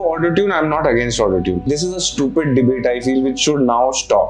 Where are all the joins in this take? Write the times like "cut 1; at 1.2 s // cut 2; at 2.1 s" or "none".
cut 1; at 1.7 s